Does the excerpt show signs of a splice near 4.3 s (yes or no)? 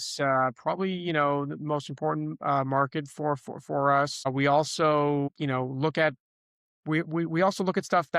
yes